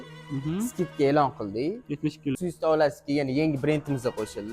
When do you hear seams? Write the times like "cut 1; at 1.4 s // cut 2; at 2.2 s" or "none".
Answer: cut 1; at 2.4 s